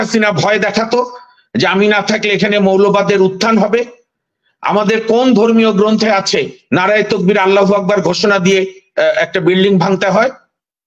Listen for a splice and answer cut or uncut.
uncut